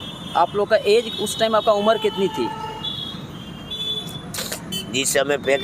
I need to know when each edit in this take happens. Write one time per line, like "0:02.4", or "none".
none